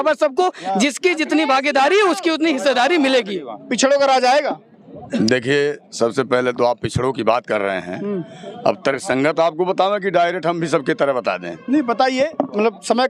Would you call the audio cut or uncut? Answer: uncut